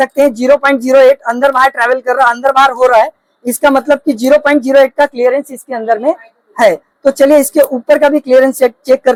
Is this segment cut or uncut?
uncut